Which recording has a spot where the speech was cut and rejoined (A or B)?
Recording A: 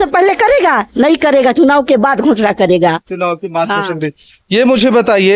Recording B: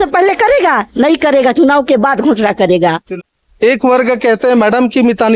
B